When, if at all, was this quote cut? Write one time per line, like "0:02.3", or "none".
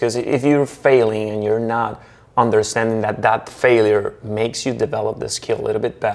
none